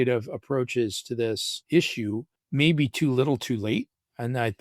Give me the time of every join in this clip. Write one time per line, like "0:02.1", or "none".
0:01.5
0:02.4